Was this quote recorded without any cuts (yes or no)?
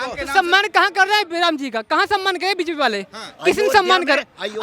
yes